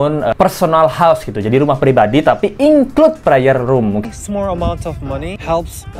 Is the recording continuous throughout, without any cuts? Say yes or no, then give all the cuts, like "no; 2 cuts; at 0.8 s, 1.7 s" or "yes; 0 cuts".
no; 1 cut; at 4.0 s